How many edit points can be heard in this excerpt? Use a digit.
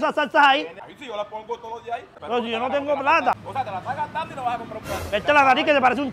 3